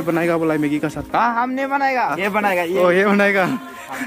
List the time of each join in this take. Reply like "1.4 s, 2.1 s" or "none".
2.2 s